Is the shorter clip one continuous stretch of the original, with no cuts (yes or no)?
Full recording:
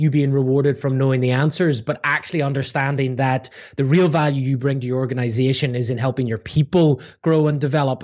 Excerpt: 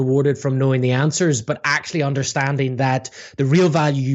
yes